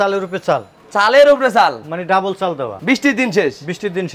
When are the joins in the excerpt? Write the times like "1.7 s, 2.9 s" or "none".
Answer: none